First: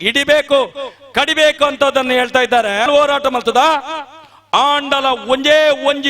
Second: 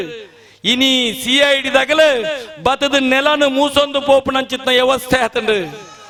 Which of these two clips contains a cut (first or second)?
first